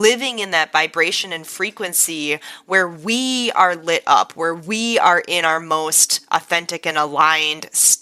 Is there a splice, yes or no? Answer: no